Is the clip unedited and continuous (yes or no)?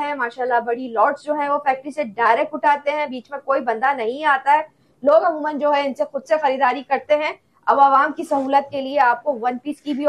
yes